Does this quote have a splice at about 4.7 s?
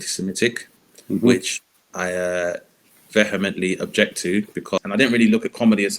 yes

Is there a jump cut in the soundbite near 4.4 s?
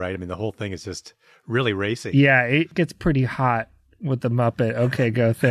no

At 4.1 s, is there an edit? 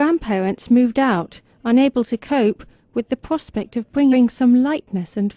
no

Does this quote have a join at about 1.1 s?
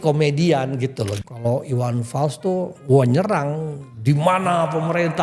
yes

